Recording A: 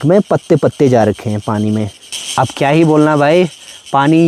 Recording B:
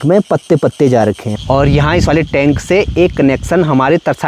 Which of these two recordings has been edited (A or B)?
B